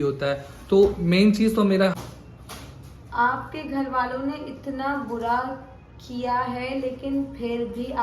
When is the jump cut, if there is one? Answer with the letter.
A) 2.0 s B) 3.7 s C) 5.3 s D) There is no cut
A